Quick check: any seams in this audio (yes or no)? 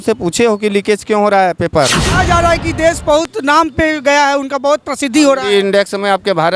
yes